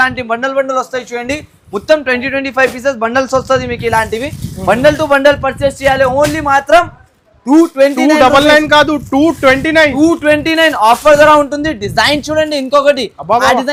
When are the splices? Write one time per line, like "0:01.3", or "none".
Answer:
none